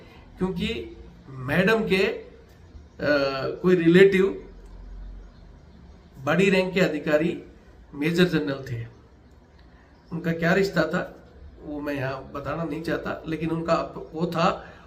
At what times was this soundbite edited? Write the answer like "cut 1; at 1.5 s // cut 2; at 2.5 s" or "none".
none